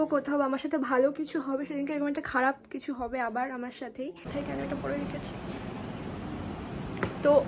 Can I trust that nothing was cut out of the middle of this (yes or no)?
no